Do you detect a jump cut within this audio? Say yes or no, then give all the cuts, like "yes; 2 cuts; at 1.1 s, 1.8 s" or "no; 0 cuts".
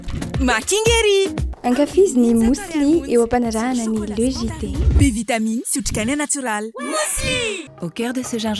yes; 1 cut; at 7.7 s